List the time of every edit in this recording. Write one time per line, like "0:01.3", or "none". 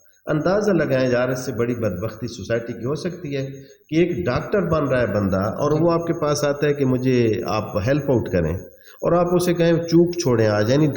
none

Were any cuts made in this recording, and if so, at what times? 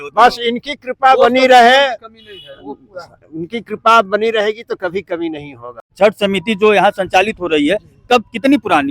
0:05.8

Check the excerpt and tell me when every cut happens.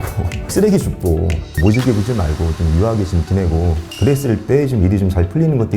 0:03.8

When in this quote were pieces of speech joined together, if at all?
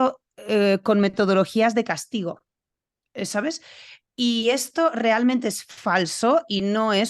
none

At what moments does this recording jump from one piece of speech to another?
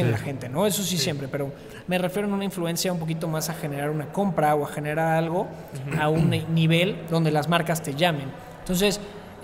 none

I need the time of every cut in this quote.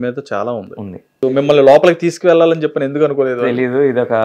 0:01.3

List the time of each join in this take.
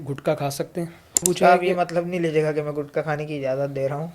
0:01.2

